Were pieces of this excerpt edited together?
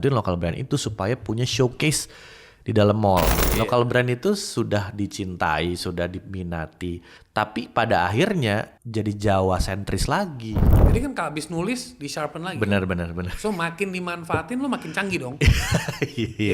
yes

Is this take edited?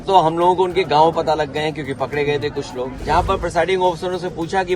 yes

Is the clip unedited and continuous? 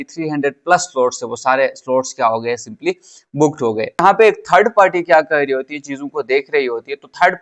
no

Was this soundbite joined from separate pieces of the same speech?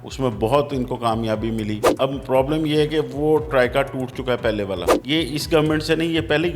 yes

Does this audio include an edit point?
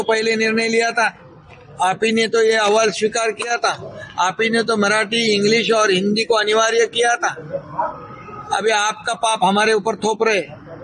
no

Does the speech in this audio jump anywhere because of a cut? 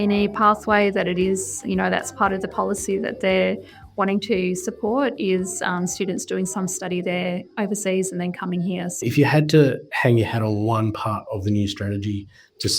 yes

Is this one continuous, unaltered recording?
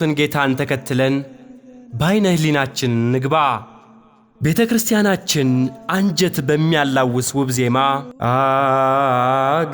no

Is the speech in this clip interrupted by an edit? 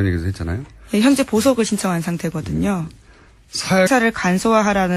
no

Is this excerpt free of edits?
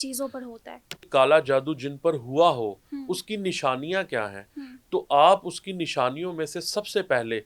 no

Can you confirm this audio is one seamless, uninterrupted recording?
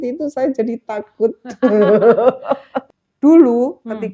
no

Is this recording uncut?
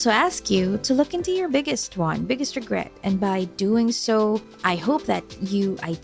no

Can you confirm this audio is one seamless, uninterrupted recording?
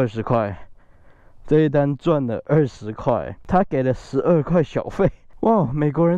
no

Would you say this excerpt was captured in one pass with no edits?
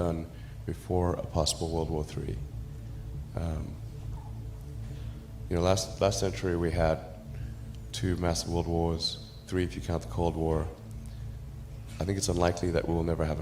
no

